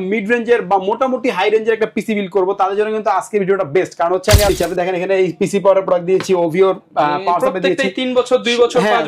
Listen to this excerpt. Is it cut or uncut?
cut